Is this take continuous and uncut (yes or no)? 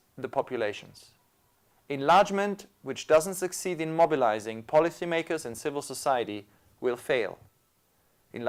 yes